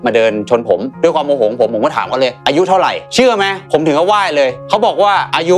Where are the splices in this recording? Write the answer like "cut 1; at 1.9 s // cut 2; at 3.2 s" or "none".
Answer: cut 1; at 3.6 s